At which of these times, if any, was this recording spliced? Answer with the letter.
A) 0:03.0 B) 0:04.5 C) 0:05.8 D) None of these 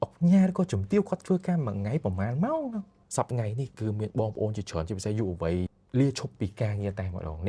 A